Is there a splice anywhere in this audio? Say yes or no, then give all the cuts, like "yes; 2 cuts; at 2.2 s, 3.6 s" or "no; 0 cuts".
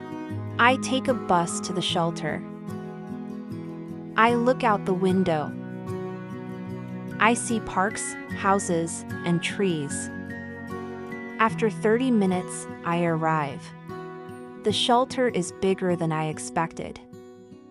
yes; 4 cuts; at 2.3 s, 3.6 s, 5.5 s, 7.0 s